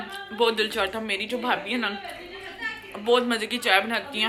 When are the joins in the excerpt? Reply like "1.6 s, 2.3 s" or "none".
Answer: none